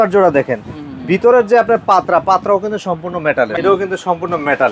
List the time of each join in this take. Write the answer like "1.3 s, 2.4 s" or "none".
3.5 s